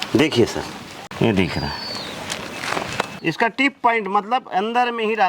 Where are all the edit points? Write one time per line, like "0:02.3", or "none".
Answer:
0:01.0
0:03.1